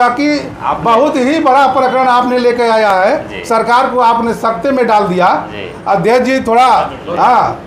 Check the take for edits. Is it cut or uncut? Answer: uncut